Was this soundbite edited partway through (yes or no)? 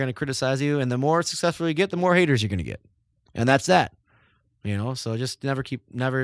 no